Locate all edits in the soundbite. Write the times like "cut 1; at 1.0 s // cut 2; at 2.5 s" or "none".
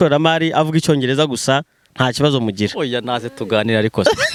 none